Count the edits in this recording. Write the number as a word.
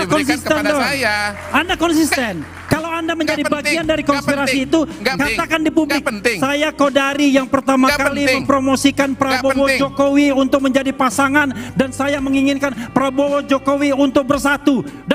one